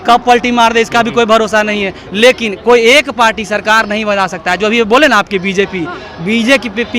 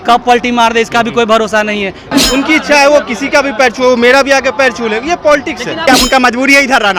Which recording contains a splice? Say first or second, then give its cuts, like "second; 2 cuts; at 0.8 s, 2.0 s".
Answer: second; 2 cuts; at 2.1 s, 5.8 s